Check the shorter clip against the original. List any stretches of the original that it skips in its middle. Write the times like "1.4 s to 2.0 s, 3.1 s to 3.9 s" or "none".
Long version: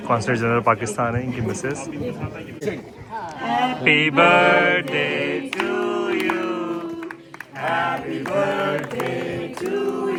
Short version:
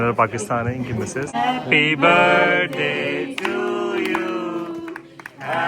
1.8 s to 3.5 s